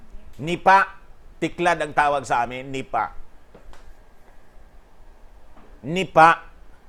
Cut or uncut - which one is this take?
uncut